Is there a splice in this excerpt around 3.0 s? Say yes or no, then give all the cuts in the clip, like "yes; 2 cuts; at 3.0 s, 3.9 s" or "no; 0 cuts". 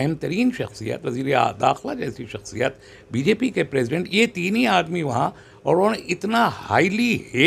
no; 0 cuts